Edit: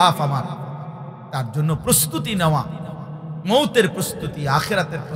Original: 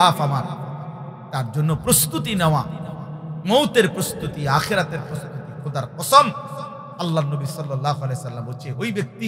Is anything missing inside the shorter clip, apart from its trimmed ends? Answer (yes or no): no